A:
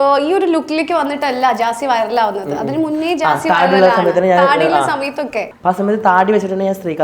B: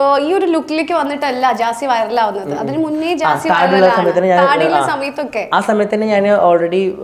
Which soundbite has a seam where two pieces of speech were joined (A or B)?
A